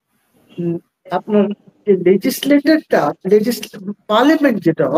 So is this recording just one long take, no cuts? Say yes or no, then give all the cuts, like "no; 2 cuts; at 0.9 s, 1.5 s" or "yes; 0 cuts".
yes; 0 cuts